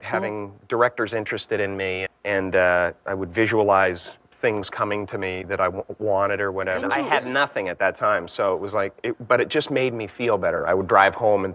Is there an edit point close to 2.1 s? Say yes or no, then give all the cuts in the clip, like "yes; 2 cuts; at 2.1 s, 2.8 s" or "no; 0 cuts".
yes; 3 cuts; at 2.1 s, 6.9 s, 10.6 s